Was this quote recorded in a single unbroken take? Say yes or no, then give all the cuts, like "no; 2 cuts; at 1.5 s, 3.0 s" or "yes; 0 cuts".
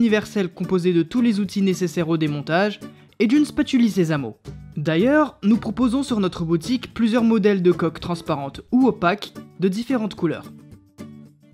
no; 1 cut; at 10.4 s